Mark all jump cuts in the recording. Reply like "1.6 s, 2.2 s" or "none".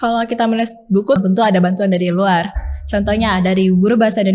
1.2 s